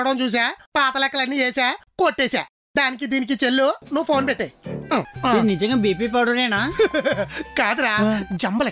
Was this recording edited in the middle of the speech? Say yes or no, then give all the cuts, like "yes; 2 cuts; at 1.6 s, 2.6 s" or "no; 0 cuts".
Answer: yes; 1 cut; at 5.1 s